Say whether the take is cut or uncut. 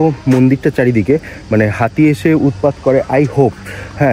uncut